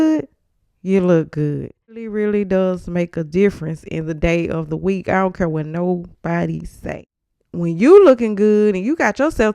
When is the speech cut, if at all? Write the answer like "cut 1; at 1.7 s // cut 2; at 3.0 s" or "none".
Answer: cut 1; at 2.1 s // cut 2; at 6.8 s